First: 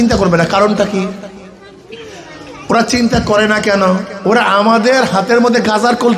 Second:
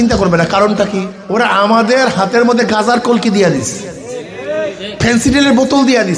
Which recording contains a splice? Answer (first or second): second